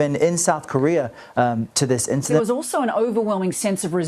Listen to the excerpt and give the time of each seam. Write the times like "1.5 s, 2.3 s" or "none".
2.4 s